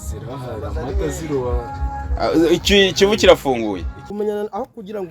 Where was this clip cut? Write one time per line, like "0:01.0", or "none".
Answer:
0:04.0